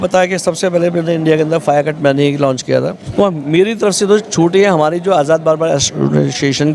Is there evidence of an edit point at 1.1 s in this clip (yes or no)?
no